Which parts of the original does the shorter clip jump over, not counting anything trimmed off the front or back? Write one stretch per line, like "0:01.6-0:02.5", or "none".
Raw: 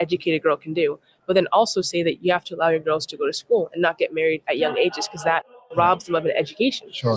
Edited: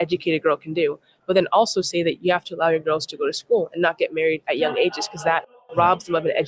none